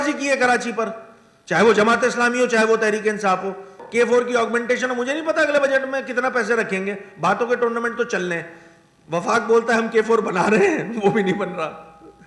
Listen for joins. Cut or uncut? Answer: cut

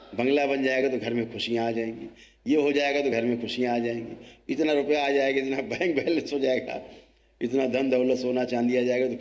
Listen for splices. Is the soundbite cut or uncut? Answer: uncut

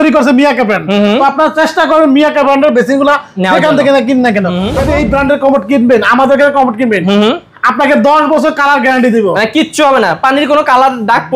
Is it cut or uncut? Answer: cut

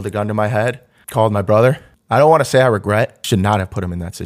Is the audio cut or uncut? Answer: cut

